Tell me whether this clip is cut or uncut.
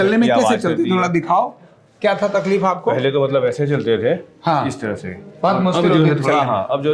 uncut